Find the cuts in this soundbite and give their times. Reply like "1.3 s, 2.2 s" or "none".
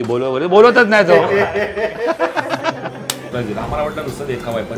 3.3 s